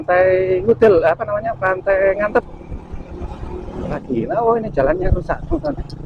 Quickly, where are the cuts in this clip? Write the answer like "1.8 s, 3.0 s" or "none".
4.0 s